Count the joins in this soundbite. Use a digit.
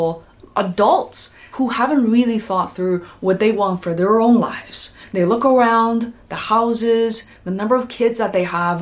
1